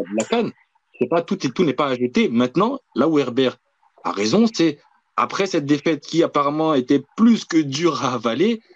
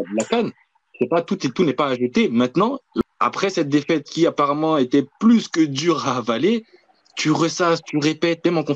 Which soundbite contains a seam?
second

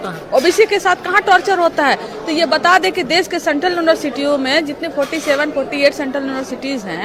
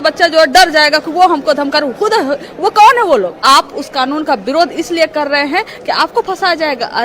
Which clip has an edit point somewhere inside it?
second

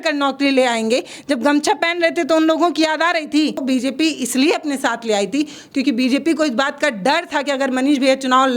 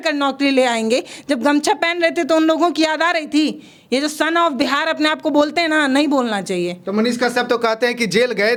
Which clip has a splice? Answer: first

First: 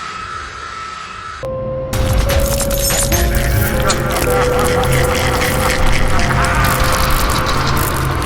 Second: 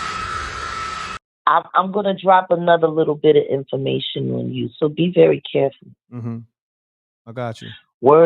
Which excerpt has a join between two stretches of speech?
second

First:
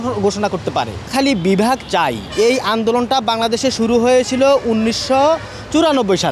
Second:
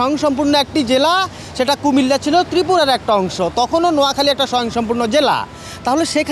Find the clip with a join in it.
first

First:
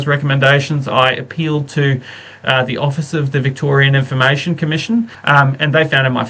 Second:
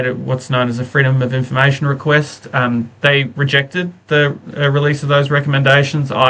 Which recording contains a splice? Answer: first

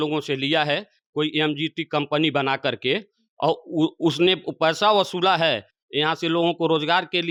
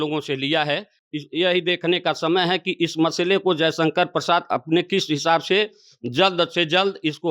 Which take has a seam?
second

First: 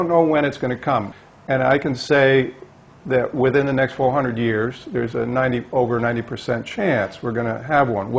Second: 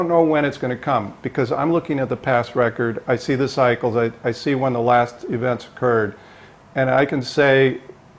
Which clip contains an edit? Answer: first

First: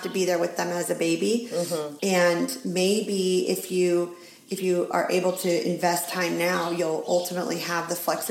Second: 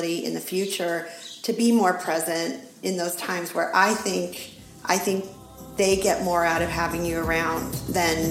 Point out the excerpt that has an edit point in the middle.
first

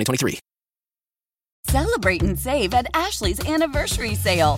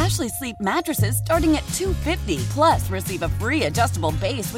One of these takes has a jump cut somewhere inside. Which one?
first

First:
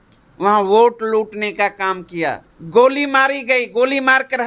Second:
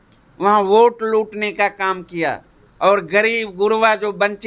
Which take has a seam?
first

